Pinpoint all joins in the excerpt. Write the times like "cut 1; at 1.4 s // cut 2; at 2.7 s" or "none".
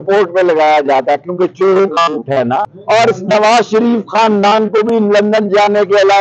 cut 1; at 2.7 s